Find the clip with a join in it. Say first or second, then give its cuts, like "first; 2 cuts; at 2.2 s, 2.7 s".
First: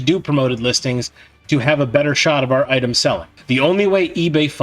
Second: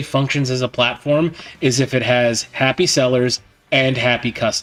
first; 1 cut; at 3.3 s